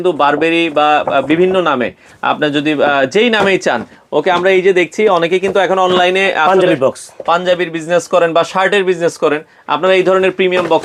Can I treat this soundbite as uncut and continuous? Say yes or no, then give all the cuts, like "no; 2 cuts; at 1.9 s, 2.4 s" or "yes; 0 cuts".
yes; 0 cuts